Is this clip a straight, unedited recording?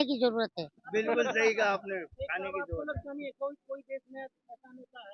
yes; 0 cuts

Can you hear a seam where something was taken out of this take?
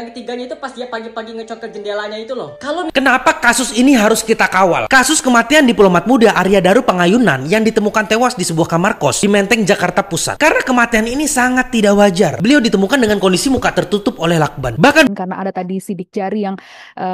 yes; 2 cuts; at 2.9 s, 15.1 s

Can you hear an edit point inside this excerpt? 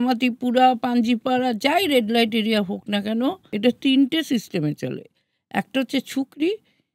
yes; 1 cut; at 3.5 s

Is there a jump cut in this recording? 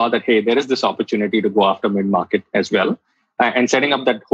no; 0 cuts

